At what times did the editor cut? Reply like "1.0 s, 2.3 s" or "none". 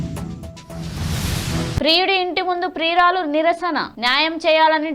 1.7 s